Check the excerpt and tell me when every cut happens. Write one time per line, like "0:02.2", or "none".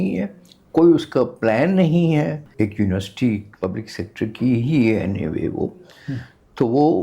0:02.4
0:03.5